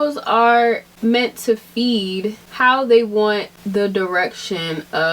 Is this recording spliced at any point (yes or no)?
yes